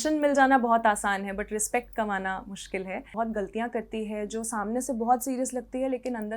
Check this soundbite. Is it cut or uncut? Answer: cut